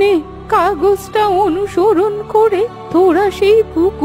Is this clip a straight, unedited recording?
yes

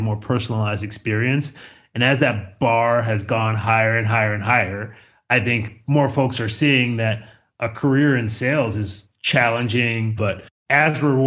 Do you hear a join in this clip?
yes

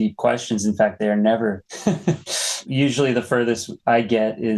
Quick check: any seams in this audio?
no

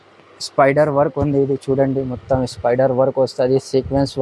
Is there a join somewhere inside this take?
no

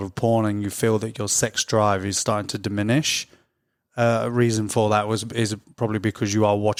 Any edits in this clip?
no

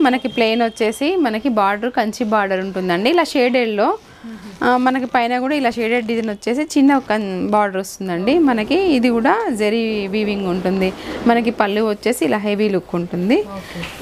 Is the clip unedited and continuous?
yes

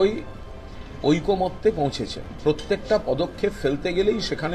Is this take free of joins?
no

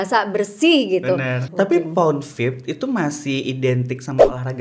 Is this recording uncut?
no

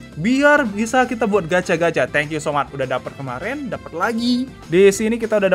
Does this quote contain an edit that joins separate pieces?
yes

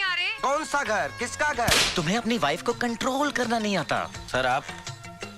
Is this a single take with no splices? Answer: no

